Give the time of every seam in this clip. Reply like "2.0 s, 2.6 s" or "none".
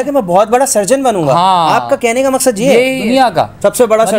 3.0 s